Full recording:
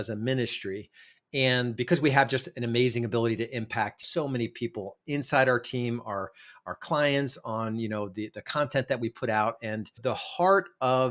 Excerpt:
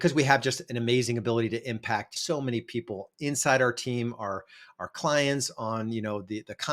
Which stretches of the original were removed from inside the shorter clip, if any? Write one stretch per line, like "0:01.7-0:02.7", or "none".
none